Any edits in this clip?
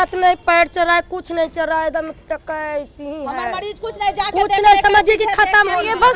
no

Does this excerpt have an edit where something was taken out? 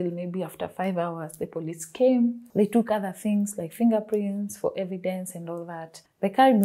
no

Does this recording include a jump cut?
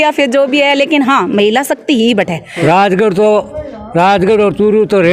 yes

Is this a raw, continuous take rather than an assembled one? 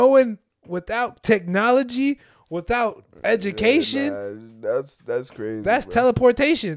yes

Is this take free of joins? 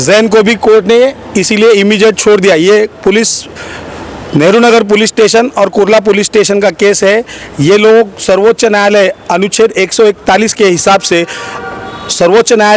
yes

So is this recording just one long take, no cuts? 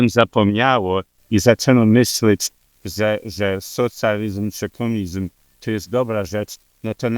yes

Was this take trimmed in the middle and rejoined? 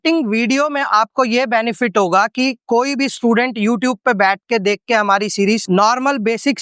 yes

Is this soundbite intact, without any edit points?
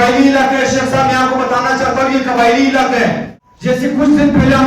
no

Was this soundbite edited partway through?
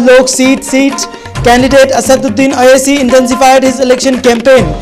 no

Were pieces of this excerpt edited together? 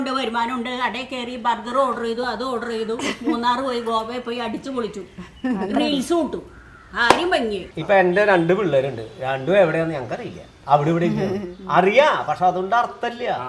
yes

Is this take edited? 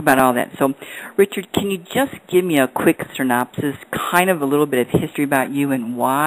yes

